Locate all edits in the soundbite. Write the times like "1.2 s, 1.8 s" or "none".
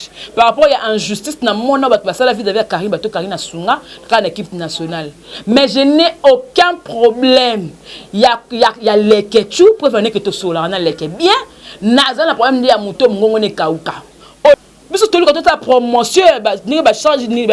14.6 s